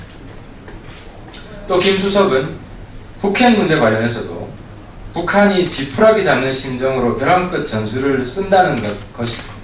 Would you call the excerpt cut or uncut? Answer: uncut